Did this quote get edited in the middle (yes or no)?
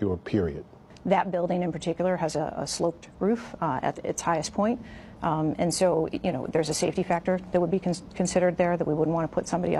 no